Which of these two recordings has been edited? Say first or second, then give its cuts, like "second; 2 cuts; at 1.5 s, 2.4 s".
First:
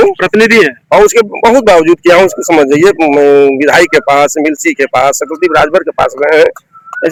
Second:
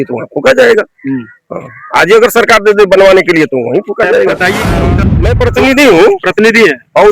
second; 1 cut; at 4.9 s